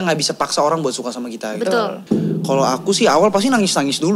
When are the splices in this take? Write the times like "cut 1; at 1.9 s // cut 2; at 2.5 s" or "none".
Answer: cut 1; at 2.0 s